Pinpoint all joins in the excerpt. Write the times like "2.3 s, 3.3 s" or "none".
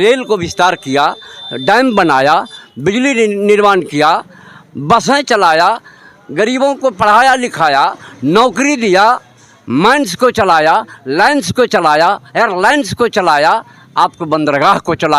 none